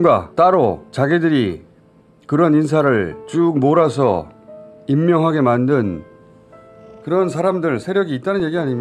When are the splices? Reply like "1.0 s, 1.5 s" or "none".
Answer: none